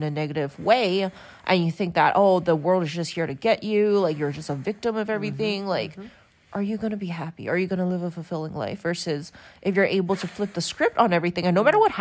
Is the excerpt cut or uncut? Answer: uncut